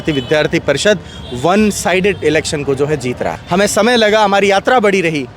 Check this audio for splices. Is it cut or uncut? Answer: cut